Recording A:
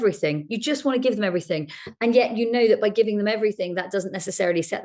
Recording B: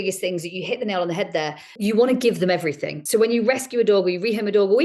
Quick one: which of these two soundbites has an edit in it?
B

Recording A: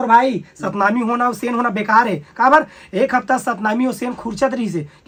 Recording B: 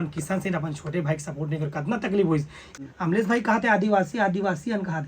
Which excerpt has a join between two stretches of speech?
B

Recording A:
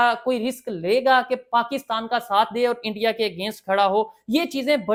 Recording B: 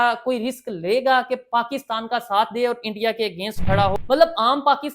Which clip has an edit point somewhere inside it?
B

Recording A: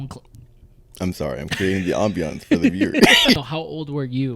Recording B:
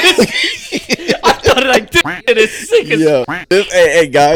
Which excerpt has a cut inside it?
A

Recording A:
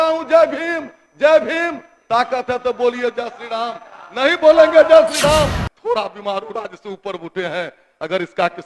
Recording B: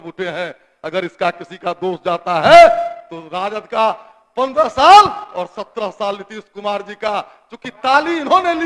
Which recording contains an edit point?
A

